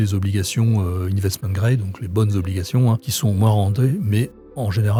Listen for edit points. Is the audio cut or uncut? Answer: uncut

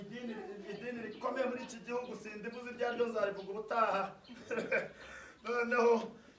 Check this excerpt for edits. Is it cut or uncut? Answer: uncut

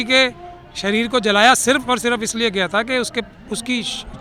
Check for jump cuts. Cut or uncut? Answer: uncut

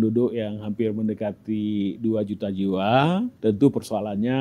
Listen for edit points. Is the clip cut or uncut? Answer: cut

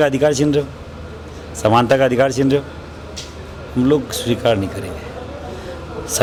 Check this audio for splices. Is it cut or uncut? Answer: uncut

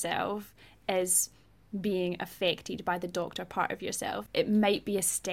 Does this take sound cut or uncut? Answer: cut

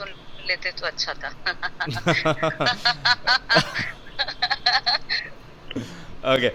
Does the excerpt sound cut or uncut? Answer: uncut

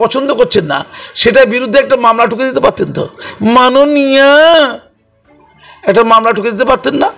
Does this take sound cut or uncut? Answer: uncut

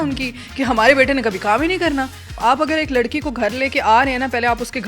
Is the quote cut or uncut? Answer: cut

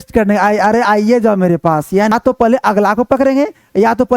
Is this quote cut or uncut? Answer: cut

